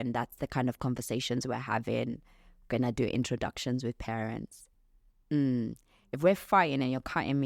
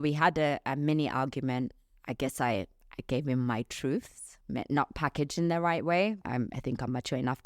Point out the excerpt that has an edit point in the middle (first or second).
second